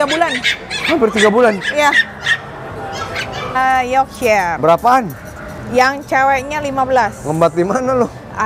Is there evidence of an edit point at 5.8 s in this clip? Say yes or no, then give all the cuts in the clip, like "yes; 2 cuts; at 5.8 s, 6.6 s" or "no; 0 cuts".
no; 1 cut; at 3.6 s